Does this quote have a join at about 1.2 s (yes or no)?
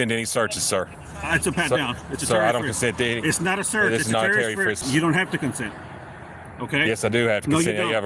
no